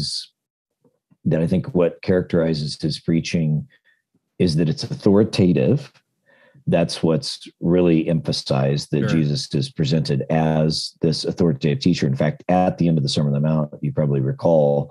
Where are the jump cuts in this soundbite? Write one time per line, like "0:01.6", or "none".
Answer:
0:06.6